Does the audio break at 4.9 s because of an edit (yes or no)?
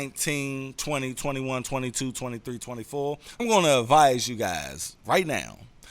no